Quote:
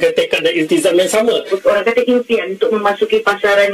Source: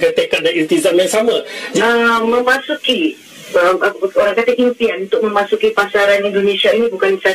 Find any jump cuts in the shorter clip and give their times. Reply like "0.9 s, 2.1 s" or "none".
1.5 s